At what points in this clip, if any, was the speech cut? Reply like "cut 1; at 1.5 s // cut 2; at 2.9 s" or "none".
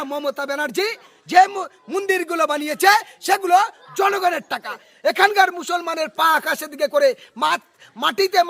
cut 1; at 4.9 s